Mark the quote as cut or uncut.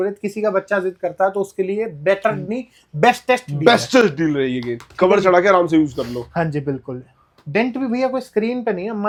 uncut